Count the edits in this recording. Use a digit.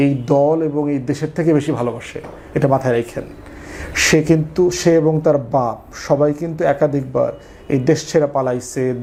0